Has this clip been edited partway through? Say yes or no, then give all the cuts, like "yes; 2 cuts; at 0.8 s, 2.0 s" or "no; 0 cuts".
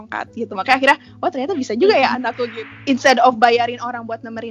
yes; 1 cut; at 2.5 s